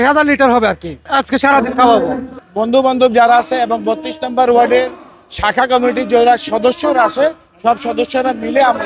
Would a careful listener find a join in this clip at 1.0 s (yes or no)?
no